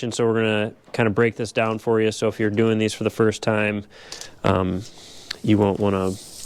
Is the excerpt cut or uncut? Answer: uncut